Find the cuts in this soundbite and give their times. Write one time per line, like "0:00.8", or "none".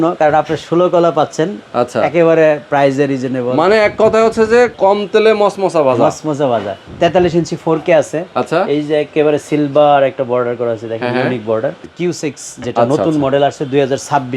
0:04.7
0:06.8
0:11.8